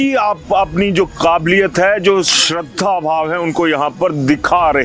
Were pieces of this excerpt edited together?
no; 0 cuts

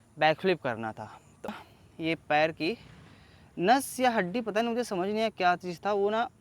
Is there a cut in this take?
yes; 1 cut; at 1.5 s

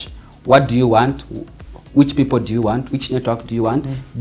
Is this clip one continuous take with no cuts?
yes; 0 cuts

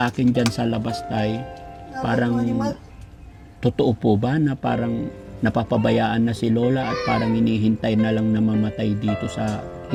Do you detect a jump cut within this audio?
no; 0 cuts

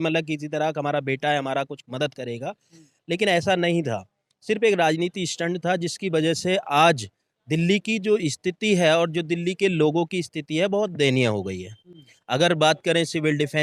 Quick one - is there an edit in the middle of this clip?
no; 0 cuts

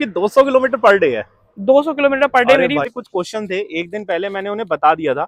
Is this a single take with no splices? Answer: no; 1 cut; at 2.8 s

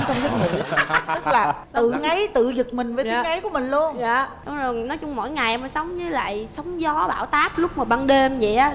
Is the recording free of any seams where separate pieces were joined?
yes; 0 cuts

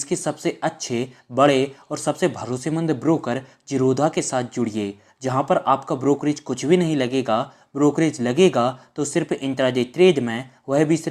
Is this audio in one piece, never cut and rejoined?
yes; 0 cuts

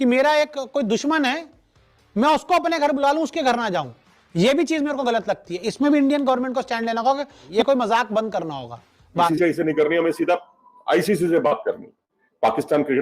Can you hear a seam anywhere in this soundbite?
yes; 2 cuts; at 7.4 s, 9.3 s

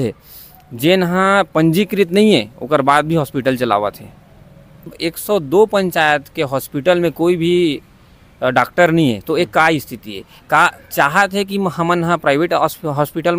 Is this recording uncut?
no; 1 cut; at 5.0 s

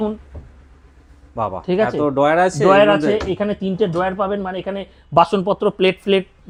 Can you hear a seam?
no; 0 cuts

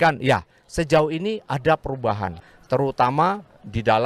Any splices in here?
yes; 1 cut; at 2.4 s

